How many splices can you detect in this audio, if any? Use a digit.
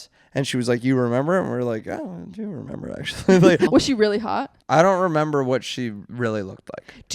2